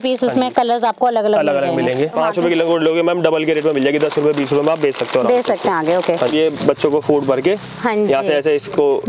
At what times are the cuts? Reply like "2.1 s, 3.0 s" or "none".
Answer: 2.2 s, 6.3 s